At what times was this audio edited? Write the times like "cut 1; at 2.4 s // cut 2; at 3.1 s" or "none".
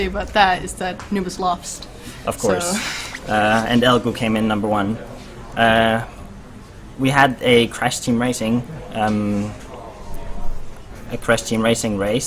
cut 1; at 3.4 s